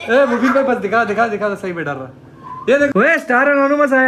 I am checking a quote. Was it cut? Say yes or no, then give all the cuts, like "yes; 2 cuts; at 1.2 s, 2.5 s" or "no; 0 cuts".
yes; 1 cut; at 2.9 s